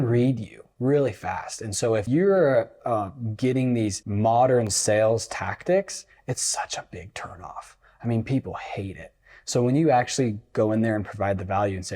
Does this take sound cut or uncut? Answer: cut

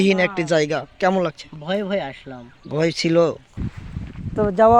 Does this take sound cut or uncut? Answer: cut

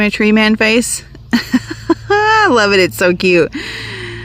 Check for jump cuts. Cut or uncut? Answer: uncut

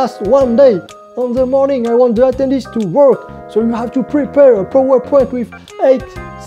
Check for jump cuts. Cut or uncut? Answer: uncut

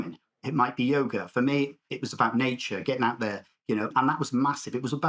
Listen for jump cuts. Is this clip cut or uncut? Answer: cut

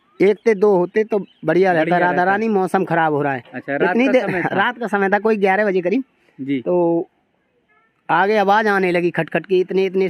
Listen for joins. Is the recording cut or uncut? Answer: uncut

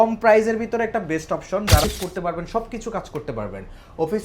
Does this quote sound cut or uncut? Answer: cut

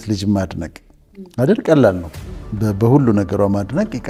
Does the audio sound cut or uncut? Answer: uncut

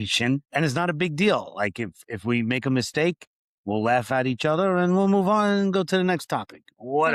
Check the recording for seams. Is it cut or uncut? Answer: uncut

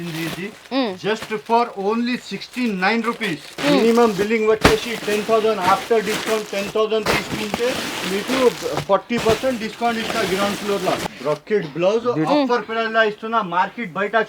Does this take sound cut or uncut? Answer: cut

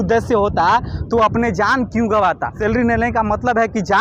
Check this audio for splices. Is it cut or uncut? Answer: cut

